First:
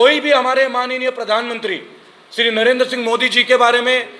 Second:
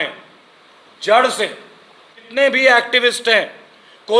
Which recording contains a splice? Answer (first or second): second